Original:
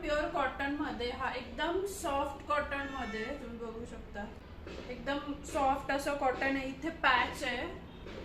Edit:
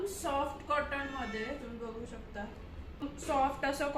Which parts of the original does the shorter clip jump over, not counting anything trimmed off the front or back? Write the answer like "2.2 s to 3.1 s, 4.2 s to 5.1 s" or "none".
4.8 s to 5.2 s